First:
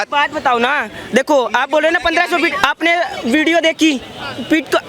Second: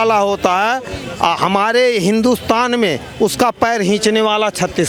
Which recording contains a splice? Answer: first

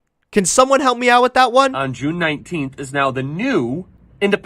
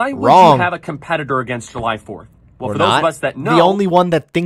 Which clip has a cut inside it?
first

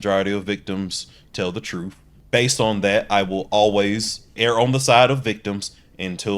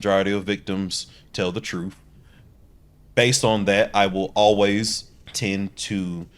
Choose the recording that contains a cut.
first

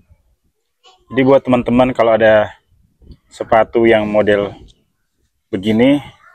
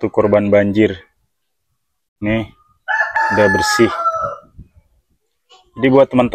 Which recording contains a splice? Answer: second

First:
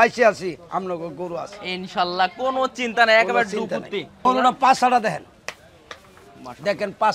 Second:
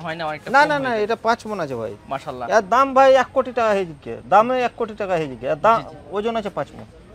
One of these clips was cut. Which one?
first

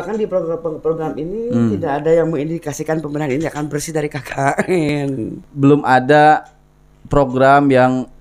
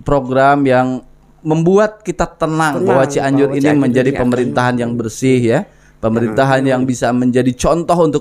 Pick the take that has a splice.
first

